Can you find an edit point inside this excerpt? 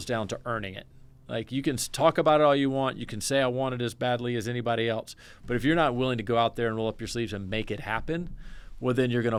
no; 0 cuts

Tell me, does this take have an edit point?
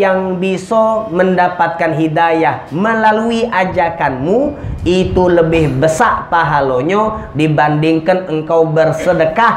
no; 0 cuts

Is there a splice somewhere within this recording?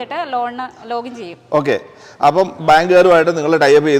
no; 0 cuts

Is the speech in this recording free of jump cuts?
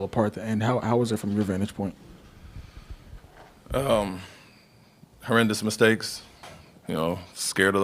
no; 1 cut; at 6.5 s

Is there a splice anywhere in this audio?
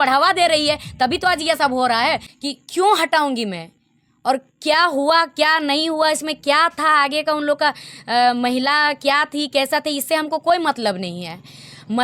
yes; 1 cut; at 2.3 s

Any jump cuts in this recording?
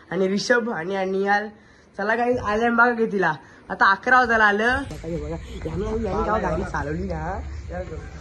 yes; 1 cut; at 5.0 s

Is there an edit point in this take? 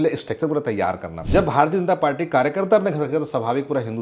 yes; 1 cut; at 1.1 s

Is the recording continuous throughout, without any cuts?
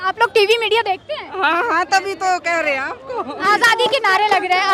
no; 1 cut; at 3.4 s

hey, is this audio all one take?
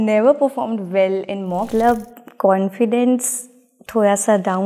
no; 1 cut; at 1.7 s

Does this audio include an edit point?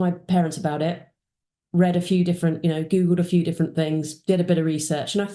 no; 0 cuts

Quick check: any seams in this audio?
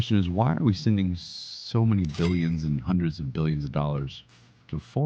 no; 0 cuts

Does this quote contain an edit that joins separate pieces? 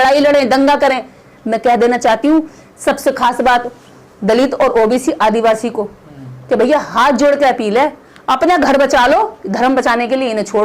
no; 0 cuts

